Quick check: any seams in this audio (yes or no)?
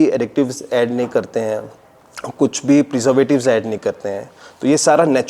no